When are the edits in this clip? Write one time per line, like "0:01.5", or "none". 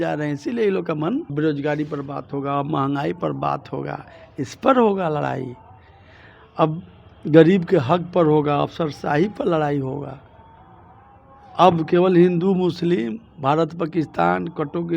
0:01.3